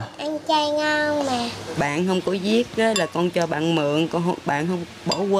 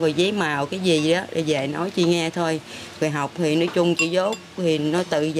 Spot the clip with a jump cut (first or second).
first